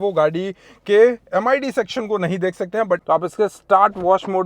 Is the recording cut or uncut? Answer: cut